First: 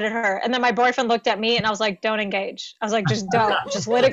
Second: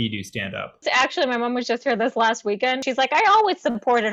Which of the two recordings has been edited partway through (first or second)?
second